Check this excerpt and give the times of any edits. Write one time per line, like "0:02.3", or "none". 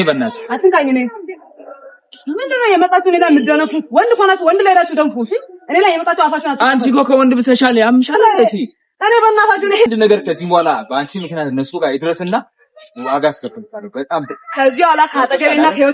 0:09.9